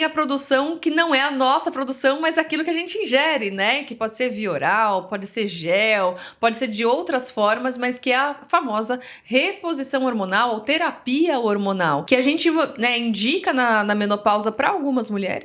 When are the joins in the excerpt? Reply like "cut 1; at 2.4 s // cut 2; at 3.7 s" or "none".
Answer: none